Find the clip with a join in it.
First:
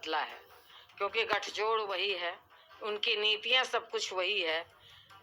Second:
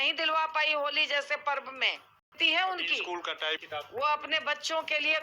second; 2 cuts; at 2.3 s, 3.6 s

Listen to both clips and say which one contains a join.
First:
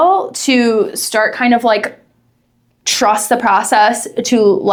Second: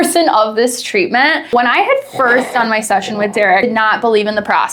second; 2 cuts; at 1.4 s, 3.4 s

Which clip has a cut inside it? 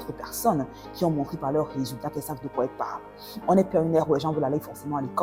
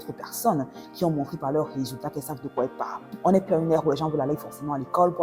second; 1 cut; at 3.0 s

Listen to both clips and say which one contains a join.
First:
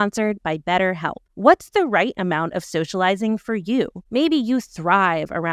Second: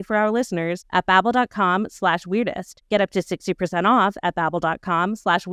first; 2 cuts; at 1.2 s, 4.0 s

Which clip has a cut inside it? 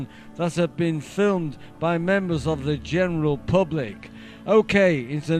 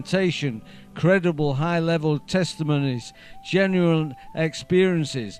first; 1 cut; at 3.1 s

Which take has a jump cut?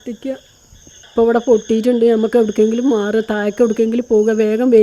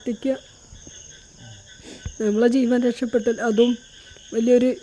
first; 1 cut; at 1.0 s

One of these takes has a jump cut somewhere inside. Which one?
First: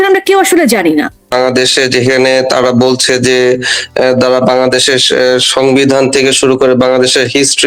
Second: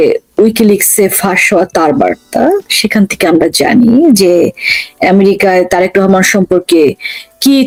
first; 1 cut; at 1.3 s

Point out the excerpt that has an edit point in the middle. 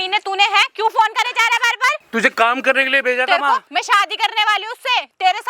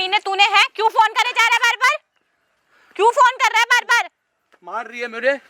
first; 2 cuts; at 2.0 s, 3.7 s

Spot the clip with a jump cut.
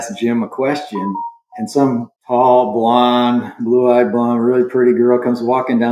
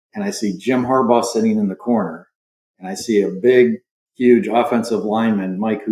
first; 1 cut; at 2.2 s

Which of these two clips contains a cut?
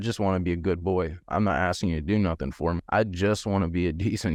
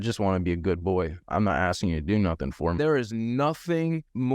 second; 1 cut; at 2.8 s

